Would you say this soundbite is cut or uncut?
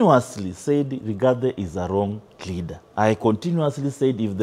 cut